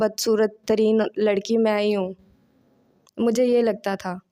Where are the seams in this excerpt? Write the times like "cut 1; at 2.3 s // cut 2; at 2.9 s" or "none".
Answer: none